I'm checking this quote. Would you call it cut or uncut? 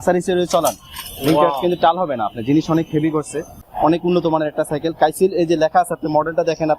cut